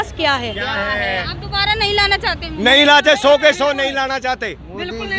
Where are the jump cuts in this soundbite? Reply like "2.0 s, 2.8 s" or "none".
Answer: 1.2 s